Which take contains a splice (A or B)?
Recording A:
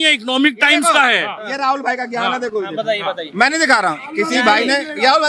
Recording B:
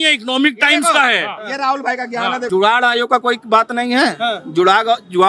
B